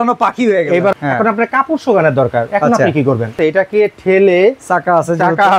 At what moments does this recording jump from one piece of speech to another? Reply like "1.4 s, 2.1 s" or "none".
0.9 s, 3.4 s